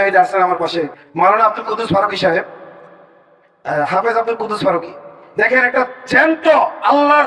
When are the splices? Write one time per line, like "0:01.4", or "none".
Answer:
0:01.0